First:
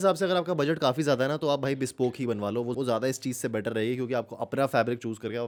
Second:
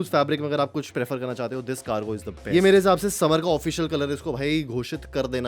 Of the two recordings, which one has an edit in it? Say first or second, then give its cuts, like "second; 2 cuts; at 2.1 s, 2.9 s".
second; 1 cut; at 2.3 s